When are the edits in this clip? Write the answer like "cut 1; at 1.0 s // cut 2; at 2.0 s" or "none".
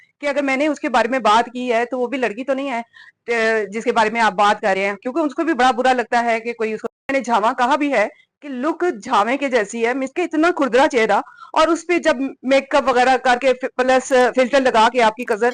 cut 1; at 7.1 s